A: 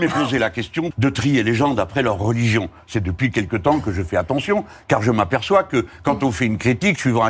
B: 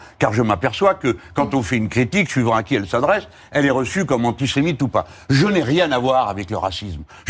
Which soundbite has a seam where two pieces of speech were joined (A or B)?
A